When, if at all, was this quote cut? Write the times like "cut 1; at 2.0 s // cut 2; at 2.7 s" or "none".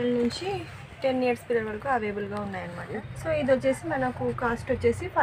cut 1; at 3.1 s